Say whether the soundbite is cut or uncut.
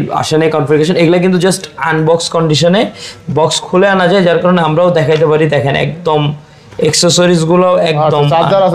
uncut